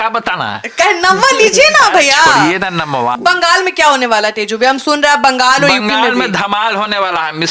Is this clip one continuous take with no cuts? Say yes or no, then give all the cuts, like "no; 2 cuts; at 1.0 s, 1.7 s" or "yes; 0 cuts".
no; 1 cut; at 3.1 s